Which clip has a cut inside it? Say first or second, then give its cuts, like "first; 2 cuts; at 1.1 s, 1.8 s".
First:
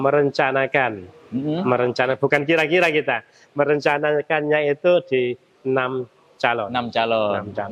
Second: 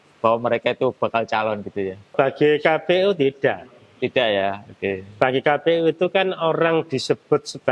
second; 1 cut; at 2.1 s